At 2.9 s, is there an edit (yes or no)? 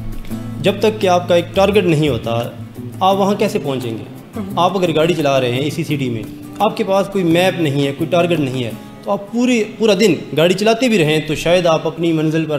no